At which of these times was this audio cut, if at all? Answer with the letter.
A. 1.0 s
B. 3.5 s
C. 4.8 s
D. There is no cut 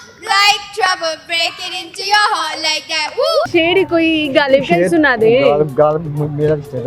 B